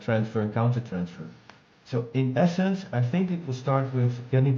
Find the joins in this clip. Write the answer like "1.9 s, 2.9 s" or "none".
1.6 s